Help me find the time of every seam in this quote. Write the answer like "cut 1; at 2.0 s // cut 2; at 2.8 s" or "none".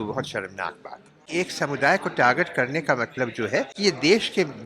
cut 1; at 1.3 s // cut 2; at 3.7 s